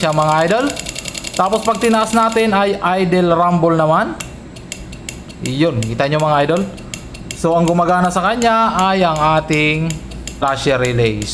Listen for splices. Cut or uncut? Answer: cut